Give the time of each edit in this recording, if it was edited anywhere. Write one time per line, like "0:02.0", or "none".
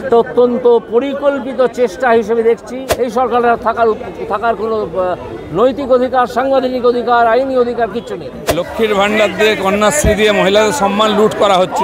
0:02.8
0:08.4